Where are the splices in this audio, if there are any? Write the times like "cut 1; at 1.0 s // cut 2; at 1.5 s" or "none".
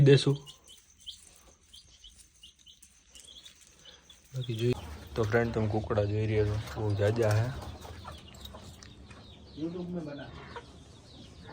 cut 1; at 4.7 s